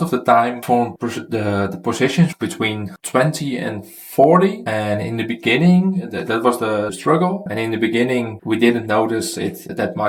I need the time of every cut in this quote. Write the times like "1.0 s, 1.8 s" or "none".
none